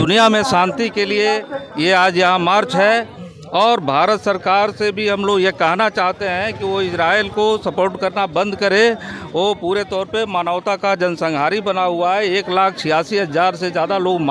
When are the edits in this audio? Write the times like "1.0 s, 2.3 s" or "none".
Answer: none